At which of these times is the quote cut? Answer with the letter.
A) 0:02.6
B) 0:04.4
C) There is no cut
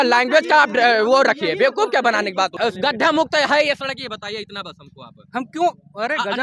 A